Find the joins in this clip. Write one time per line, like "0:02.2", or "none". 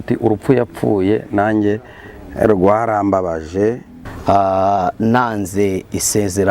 0:04.2